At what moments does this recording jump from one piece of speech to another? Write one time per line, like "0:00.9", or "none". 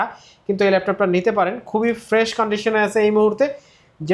none

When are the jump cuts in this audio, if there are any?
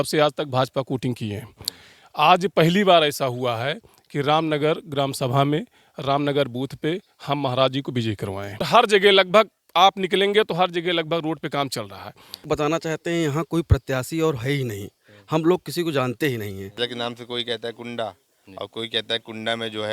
0:08.7
0:12.5
0:16.8

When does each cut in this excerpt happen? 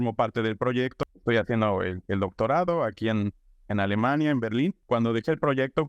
0:01.0
0:04.8

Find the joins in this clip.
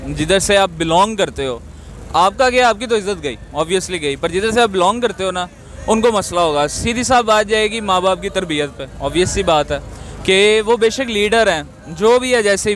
none

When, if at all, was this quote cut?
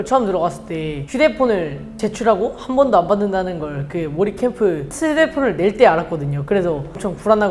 none

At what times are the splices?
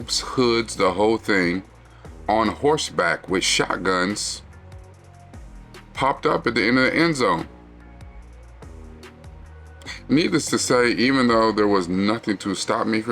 0:08.0
0:09.6

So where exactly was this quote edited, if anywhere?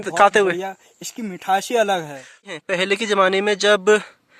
0:02.5

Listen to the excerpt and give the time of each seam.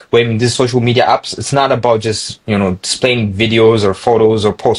none

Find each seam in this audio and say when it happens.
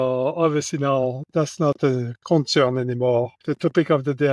0:03.3

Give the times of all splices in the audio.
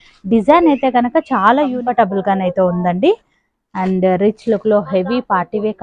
0:01.7

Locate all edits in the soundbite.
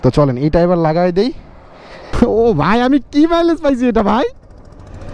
0:02.0

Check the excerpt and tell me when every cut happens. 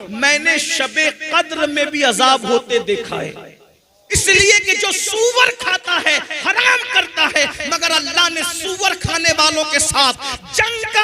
0:04.1

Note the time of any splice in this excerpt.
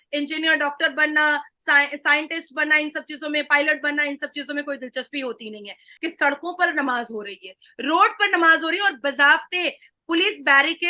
0:05.9

